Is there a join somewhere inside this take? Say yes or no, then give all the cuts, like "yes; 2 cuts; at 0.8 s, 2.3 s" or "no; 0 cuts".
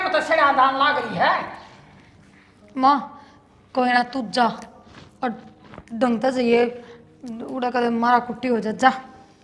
no; 0 cuts